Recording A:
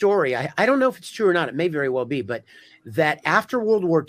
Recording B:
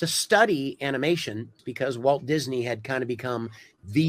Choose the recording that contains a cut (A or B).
B